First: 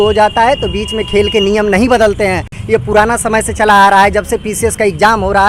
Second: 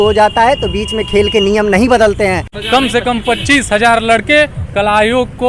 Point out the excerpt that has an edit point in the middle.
second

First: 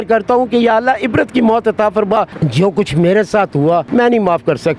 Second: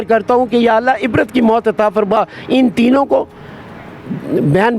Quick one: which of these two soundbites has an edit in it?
first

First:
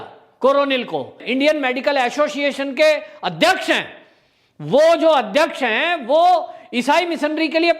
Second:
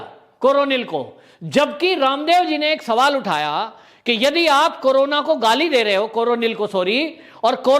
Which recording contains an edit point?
first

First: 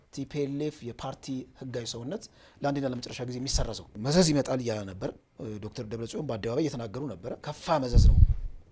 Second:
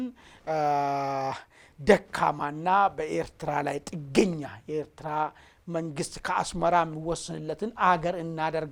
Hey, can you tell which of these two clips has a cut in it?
first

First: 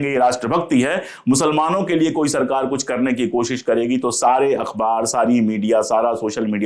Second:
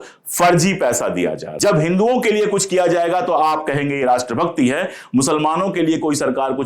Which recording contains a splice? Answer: second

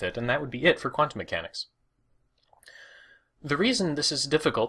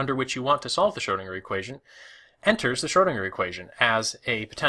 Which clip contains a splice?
second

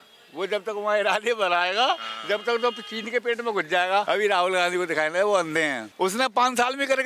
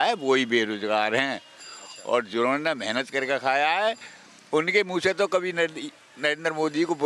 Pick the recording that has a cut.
first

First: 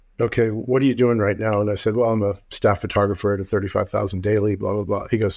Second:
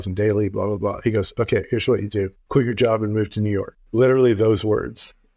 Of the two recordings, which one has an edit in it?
second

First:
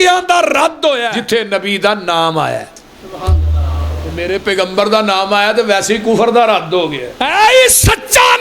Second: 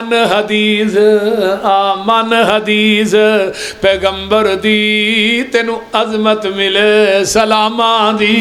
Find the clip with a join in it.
first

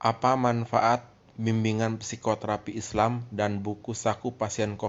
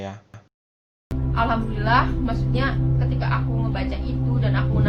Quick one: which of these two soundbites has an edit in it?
second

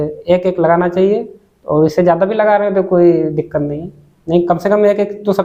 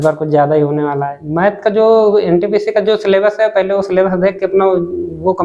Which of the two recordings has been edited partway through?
second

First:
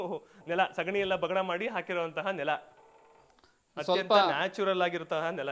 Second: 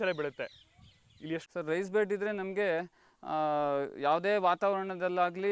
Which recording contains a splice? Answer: second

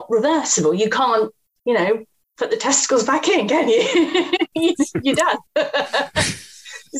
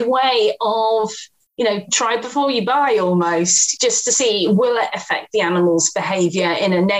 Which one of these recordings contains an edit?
second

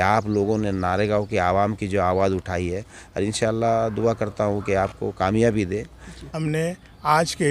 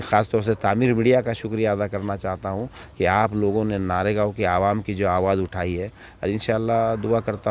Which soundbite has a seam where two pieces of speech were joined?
first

